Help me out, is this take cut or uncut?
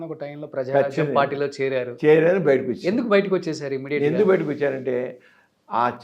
uncut